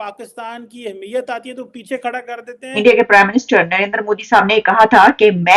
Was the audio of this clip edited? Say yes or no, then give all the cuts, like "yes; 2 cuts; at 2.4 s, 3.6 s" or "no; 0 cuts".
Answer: yes; 1 cut; at 2.7 s